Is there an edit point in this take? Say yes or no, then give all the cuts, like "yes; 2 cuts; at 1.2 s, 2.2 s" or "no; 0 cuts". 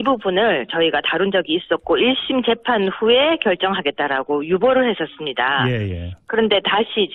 yes; 1 cut; at 2.2 s